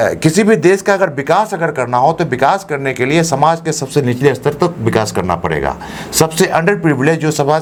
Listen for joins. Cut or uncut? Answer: uncut